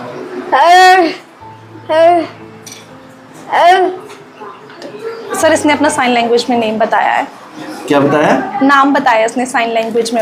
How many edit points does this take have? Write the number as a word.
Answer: zero